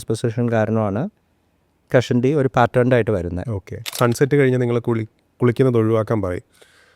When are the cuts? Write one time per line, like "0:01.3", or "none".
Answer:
0:03.9